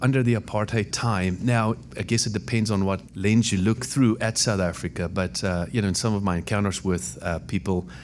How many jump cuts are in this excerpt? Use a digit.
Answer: 4